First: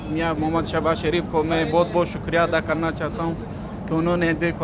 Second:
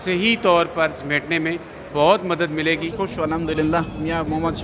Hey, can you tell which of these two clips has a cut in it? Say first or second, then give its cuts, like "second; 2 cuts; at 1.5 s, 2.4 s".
second; 1 cut; at 2.9 s